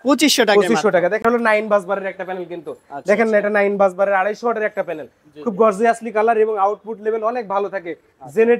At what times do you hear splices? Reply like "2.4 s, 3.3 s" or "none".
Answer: 1.2 s

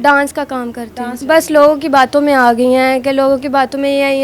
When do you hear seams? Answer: 1.2 s

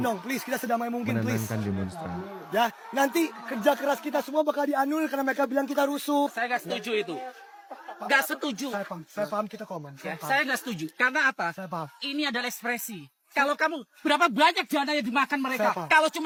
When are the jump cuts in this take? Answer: none

